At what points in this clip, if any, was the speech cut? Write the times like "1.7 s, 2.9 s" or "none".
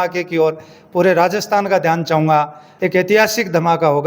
2.6 s